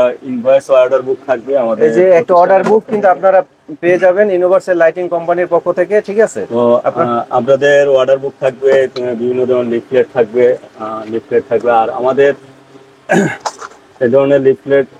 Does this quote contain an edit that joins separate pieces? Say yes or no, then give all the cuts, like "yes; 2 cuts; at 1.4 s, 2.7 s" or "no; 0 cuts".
no; 0 cuts